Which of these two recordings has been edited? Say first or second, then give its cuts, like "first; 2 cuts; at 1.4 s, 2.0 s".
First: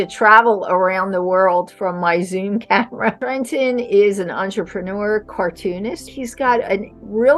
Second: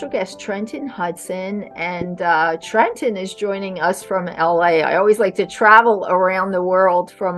first; 2 cuts; at 3.2 s, 6.1 s